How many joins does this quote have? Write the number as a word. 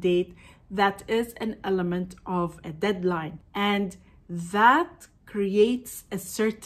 one